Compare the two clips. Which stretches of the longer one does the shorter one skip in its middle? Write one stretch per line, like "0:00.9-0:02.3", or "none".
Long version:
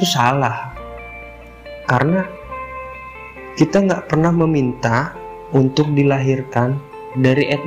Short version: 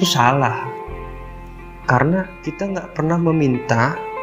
0:02.6-0:03.7